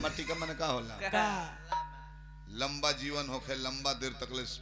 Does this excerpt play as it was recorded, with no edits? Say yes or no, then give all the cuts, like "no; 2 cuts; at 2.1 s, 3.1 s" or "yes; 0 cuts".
yes; 0 cuts